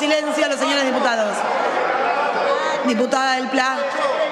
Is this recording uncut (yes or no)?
yes